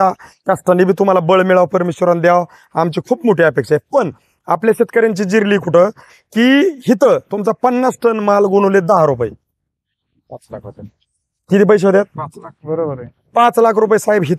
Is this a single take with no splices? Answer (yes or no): no